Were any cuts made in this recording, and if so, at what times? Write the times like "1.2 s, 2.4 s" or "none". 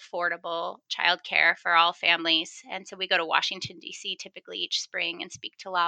none